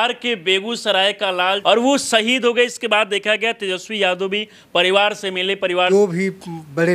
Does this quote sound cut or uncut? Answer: cut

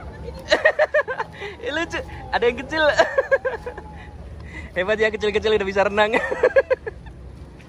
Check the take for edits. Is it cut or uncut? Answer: uncut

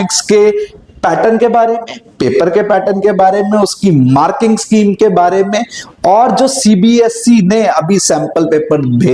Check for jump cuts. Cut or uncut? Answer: uncut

